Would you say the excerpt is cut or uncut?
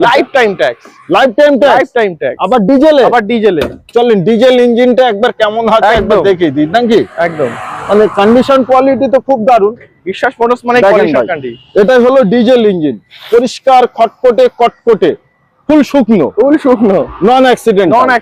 uncut